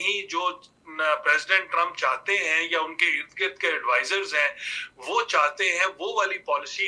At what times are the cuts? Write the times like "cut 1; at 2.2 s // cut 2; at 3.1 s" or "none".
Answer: none